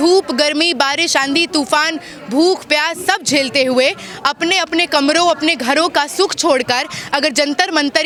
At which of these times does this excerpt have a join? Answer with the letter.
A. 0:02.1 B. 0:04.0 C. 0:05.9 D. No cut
D